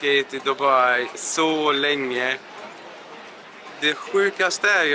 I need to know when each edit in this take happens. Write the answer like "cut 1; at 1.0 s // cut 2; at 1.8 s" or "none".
none